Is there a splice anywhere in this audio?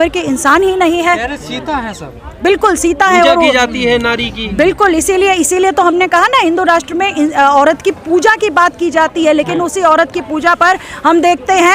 no; 0 cuts

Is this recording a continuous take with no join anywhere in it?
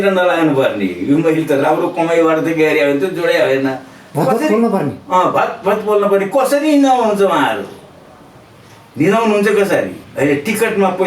no; 1 cut; at 10.0 s

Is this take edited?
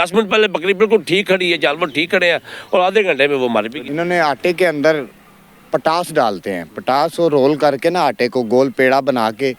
yes; 1 cut; at 3.8 s

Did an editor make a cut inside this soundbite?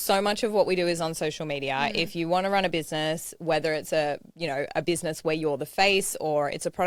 no; 0 cuts

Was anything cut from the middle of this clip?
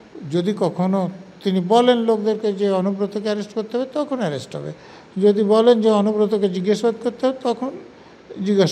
no; 0 cuts

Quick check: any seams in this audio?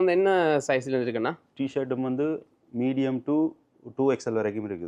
no; 0 cuts

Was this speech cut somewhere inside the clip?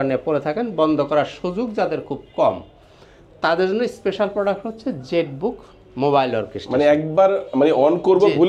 no; 0 cuts

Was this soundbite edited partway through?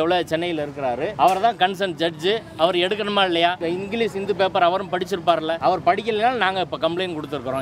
yes; 3 cuts; at 1.1 s, 3.6 s, 5.6 s

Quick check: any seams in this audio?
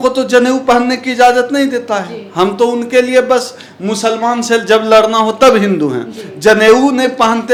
no; 0 cuts

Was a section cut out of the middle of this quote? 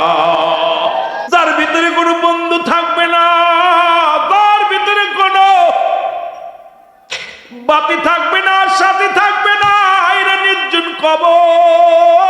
yes; 1 cut; at 1.2 s

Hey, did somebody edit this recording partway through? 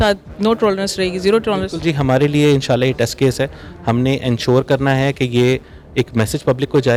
no; 0 cuts

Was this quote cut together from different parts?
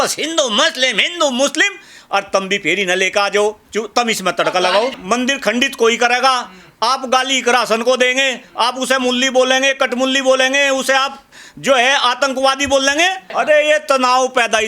yes; 2 cuts; at 5.0 s, 13.2 s

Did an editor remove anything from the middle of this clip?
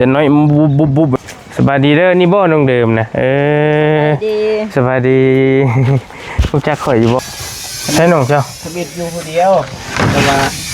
yes; 2 cuts; at 1.1 s, 7.2 s

